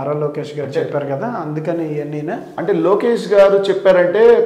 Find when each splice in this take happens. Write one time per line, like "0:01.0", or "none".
none